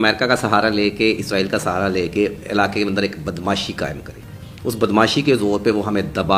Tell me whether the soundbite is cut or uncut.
uncut